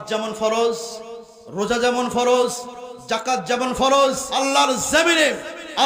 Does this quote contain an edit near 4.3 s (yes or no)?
yes